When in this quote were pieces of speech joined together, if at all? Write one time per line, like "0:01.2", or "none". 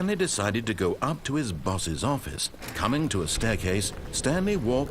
0:02.6